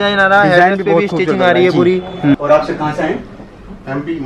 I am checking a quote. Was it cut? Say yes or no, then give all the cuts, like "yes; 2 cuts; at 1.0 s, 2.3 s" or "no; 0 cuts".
yes; 1 cut; at 2.3 s